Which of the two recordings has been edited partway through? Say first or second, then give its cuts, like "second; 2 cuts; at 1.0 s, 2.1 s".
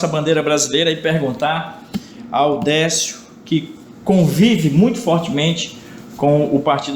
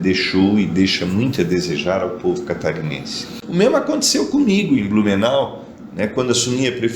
second; 1 cut; at 3.4 s